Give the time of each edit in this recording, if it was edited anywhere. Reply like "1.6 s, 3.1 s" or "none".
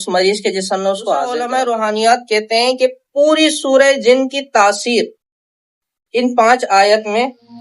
1.4 s